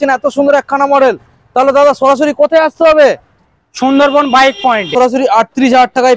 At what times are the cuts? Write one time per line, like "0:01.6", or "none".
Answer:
0:04.9